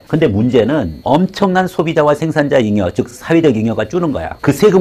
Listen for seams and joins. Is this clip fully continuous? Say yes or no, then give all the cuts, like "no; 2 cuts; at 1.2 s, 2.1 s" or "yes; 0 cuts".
no; 1 cut; at 0.9 s